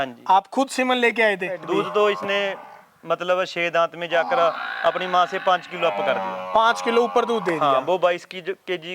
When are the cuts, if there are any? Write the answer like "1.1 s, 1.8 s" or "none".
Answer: 1.6 s